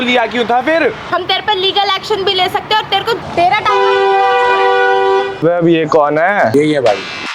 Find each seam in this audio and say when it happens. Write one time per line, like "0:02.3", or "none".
0:01.0
0:03.2
0:06.5

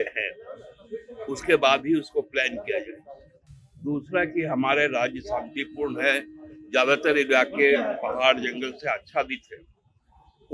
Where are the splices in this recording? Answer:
none

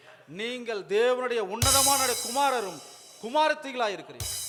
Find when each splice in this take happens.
none

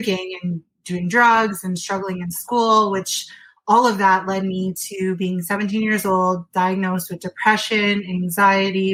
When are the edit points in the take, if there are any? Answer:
none

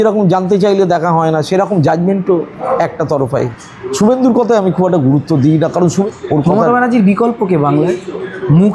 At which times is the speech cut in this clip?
0:03.5
0:06.0

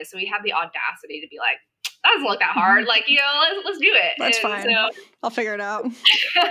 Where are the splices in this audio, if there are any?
none

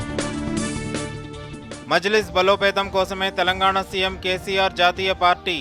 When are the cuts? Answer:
none

